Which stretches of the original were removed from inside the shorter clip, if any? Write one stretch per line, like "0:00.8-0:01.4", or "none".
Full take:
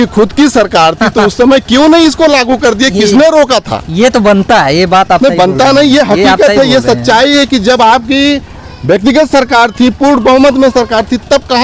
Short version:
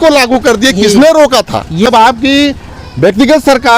0:04.0-0:07.7